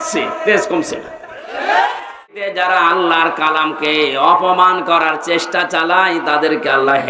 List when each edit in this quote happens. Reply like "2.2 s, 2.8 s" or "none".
2.5 s